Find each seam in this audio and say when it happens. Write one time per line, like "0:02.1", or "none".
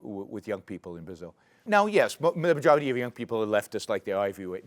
0:01.6